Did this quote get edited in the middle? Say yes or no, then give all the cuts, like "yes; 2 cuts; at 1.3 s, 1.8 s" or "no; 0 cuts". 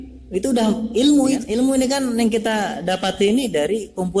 yes; 1 cut; at 1.5 s